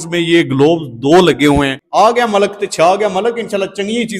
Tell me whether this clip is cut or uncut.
cut